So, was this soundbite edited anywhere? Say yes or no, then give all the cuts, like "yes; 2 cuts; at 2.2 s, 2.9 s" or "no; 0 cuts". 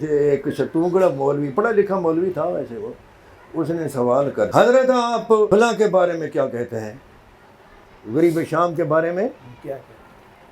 yes; 2 cuts; at 4.5 s, 5.5 s